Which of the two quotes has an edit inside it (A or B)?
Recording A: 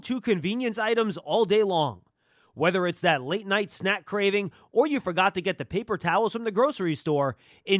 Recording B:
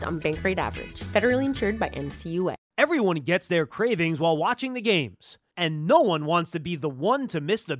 B